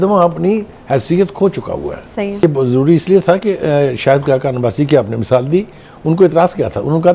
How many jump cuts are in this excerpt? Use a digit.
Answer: 1